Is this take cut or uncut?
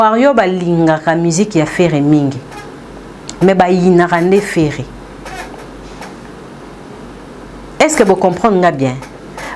uncut